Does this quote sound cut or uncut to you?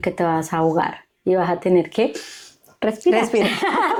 uncut